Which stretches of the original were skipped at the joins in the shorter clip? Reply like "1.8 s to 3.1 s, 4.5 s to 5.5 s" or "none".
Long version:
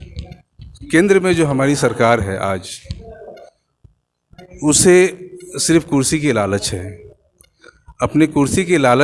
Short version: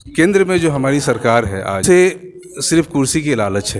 2.6 s to 4.8 s